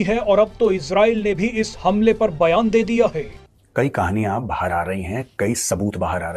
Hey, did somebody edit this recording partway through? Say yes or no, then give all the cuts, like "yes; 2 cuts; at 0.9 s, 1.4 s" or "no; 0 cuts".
yes; 1 cut; at 3.4 s